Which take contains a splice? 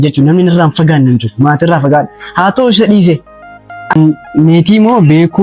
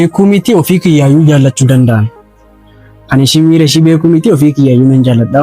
first; 1 cut; at 3.9 s

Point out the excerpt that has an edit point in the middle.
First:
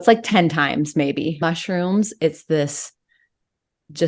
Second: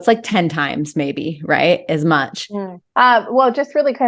first; 1 cut; at 1.4 s

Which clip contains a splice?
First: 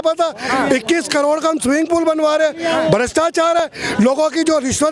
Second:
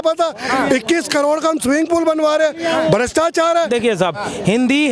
second; 1 cut; at 3.6 s

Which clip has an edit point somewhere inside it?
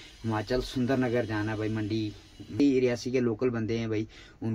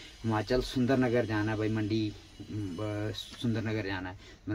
first; 1 cut; at 2.6 s

